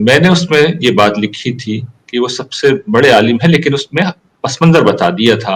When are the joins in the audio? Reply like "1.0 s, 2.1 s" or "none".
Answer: none